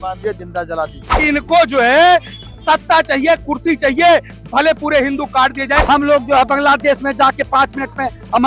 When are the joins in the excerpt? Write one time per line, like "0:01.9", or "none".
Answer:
0:01.2
0:05.8